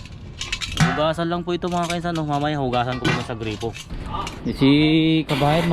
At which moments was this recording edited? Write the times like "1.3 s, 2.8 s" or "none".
3.9 s